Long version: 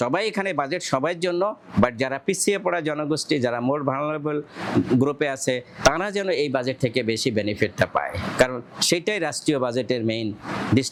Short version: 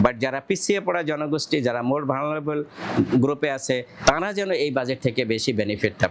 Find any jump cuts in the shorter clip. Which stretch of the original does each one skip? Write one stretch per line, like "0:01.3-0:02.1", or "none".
none